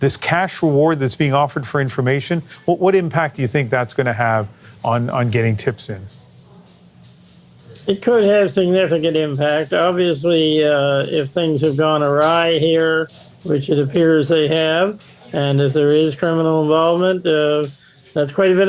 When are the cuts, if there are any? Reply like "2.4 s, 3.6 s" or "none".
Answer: none